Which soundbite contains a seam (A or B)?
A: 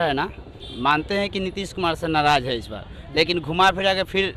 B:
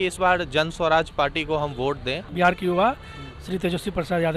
B